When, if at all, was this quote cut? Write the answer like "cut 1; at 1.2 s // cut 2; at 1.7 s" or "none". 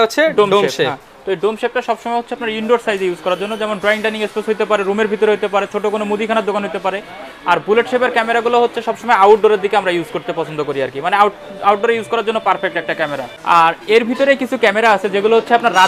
none